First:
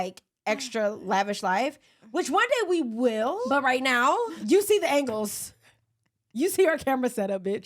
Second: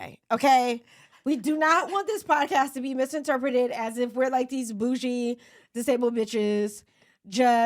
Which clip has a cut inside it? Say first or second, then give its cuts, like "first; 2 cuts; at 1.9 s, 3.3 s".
first; 2 cuts; at 3.4 s, 4.4 s